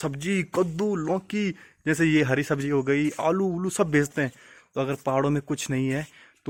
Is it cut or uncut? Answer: uncut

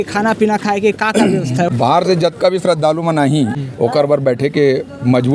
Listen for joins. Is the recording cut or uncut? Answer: cut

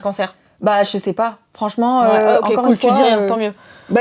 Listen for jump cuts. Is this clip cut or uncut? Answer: uncut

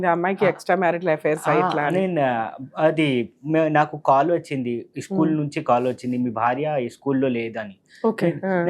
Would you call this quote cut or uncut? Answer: uncut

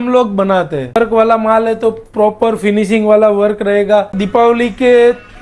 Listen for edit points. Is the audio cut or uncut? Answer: cut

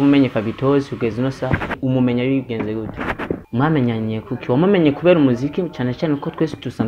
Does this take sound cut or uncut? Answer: cut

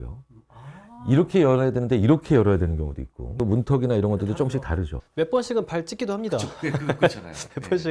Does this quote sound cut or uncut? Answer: cut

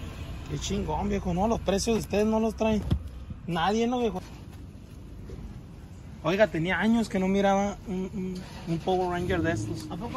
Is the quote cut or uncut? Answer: cut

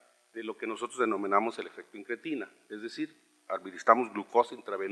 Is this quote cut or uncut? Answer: cut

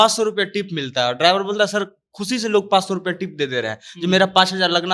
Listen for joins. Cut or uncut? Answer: uncut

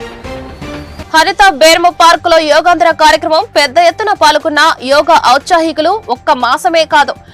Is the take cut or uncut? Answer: cut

